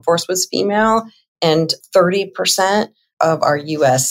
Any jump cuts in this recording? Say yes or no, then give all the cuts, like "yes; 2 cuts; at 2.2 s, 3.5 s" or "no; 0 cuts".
no; 0 cuts